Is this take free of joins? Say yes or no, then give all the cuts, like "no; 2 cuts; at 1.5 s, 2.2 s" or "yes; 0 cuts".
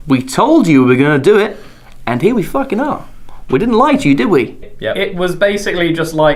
yes; 0 cuts